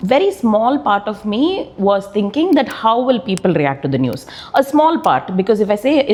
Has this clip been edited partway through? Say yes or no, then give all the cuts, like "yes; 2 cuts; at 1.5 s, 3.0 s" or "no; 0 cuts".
no; 0 cuts